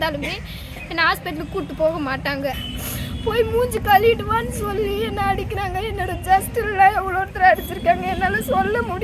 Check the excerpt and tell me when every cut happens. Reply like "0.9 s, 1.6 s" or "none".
2.6 s